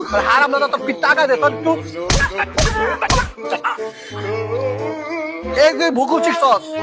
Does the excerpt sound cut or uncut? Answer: uncut